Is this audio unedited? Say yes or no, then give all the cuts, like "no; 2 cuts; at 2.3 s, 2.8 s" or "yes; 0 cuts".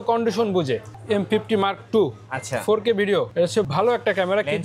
no; 1 cut; at 0.9 s